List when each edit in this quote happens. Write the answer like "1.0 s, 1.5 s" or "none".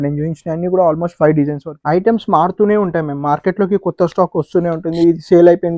1.7 s